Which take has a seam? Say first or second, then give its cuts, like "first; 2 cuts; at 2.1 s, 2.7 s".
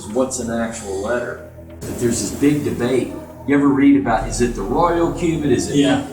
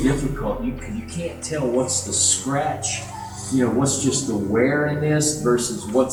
first; 1 cut; at 1.9 s